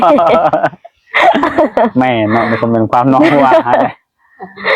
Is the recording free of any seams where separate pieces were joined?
yes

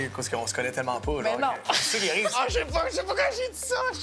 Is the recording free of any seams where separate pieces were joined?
no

